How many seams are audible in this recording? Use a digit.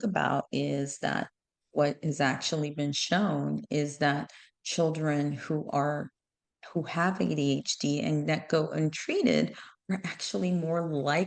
0